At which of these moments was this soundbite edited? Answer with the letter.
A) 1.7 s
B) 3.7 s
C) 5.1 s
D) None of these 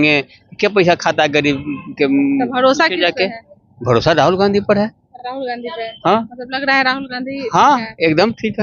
D